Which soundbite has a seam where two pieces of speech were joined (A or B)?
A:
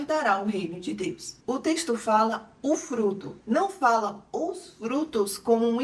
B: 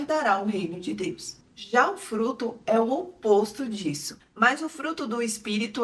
A